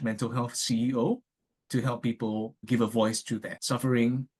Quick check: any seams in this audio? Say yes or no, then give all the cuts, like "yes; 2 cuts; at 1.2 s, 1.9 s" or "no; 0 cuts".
yes; 2 cuts; at 2.6 s, 3.5 s